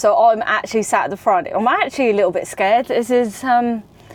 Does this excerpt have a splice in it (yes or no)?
no